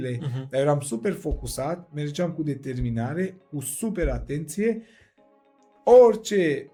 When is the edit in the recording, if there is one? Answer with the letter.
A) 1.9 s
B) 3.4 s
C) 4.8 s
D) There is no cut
D